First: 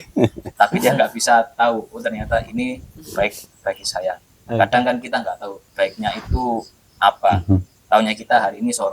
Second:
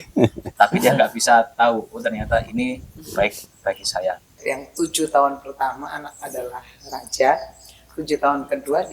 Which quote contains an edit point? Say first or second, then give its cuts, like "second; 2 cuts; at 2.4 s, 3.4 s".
second; 1 cut; at 4.4 s